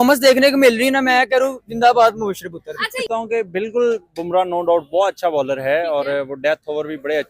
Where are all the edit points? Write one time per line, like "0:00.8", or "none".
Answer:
0:03.0